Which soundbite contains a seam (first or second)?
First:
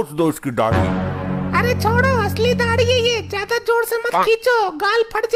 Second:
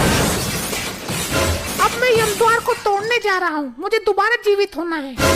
second